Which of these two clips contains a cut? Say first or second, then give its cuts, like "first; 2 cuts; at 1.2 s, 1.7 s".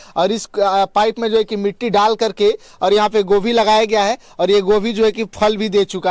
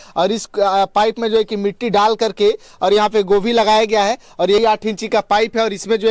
second; 1 cut; at 4.6 s